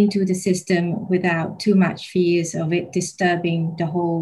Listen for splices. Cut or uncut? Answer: uncut